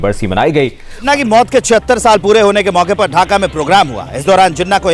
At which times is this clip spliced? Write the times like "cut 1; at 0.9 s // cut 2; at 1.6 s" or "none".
cut 1; at 1.0 s